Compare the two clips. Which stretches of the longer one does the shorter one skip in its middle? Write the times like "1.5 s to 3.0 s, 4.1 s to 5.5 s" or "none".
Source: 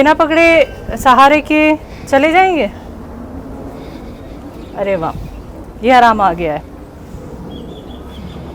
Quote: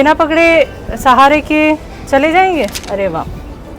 2.8 s to 4.7 s